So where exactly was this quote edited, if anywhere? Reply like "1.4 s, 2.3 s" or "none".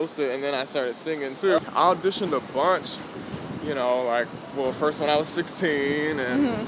1.6 s